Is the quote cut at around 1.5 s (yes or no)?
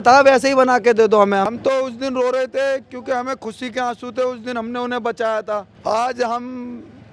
yes